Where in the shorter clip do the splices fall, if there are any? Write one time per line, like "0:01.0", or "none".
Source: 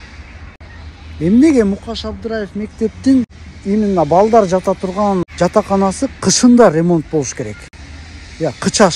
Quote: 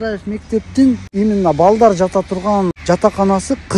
0:01.1